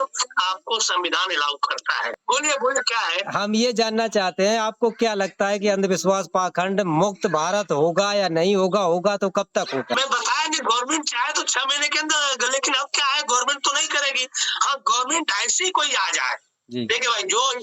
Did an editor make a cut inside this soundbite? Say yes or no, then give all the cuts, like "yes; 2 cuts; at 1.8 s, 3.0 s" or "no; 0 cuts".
yes; 2 cuts; at 2.2 s, 9.9 s